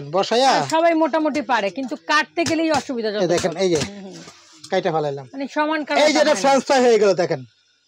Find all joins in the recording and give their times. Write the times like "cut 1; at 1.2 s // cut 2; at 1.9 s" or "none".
none